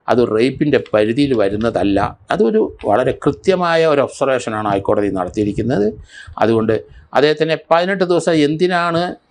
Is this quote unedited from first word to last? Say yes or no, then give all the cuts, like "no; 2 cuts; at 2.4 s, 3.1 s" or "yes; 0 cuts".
yes; 0 cuts